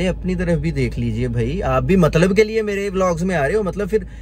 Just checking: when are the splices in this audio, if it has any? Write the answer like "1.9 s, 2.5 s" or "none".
none